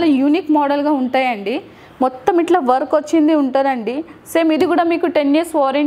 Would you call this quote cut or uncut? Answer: uncut